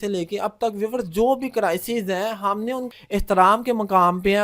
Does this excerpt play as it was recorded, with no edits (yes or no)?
no